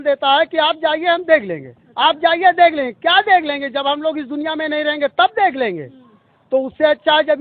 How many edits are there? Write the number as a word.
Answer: zero